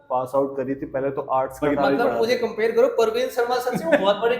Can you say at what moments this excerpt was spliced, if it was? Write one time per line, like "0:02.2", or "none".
0:01.6